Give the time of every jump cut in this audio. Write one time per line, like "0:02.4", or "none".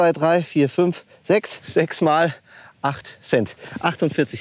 0:01.6